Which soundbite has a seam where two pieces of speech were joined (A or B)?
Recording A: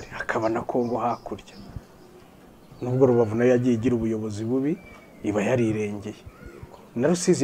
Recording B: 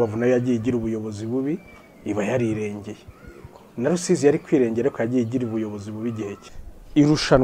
B